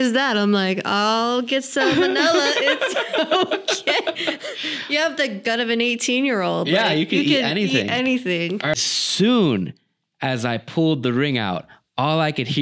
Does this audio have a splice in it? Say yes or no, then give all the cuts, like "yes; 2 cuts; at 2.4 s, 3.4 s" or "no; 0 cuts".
yes; 1 cut; at 8.8 s